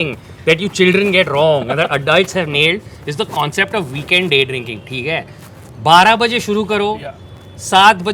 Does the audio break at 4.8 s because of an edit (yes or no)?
no